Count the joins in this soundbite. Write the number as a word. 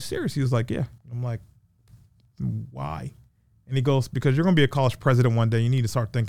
one